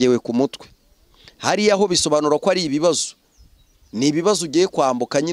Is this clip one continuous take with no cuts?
yes; 0 cuts

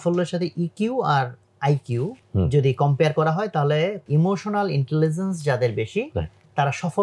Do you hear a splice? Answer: yes; 2 cuts; at 2.2 s, 4.0 s

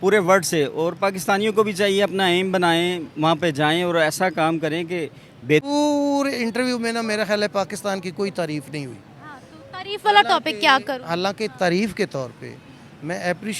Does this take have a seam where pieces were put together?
yes; 1 cut; at 5.6 s

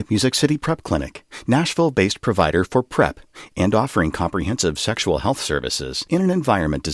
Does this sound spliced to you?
no; 0 cuts

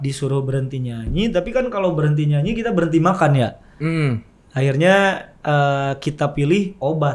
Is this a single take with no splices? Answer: yes; 0 cuts

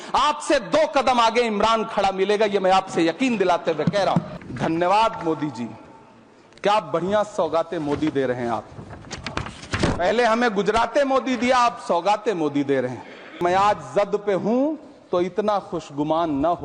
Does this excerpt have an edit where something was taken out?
yes; 2 cuts; at 4.3 s, 13.4 s

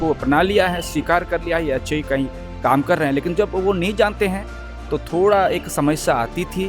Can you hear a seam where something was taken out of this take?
no; 0 cuts

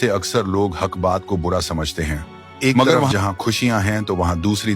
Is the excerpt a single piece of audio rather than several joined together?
no; 1 cut; at 3.1 s

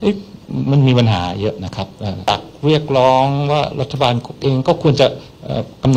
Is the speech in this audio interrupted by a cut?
yes; 1 cut; at 2.3 s

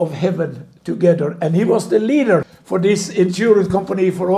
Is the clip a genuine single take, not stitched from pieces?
no; 1 cut; at 2.6 s

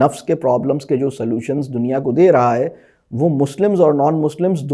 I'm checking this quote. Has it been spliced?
no; 0 cuts

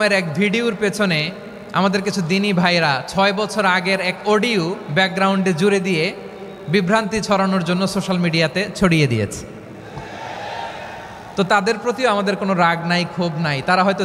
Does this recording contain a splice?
no; 0 cuts

